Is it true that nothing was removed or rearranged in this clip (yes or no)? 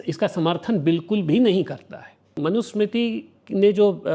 no